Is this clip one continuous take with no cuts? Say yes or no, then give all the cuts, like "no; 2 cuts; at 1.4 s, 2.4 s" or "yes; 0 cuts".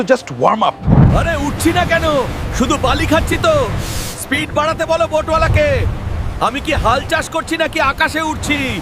no; 1 cut; at 0.9 s